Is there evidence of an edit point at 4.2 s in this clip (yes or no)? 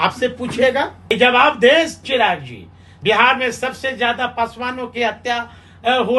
no